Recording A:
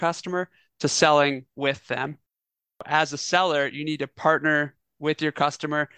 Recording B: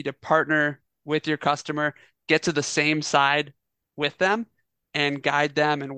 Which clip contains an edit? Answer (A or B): A